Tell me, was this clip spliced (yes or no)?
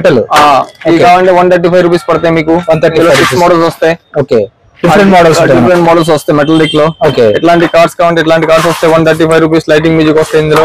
no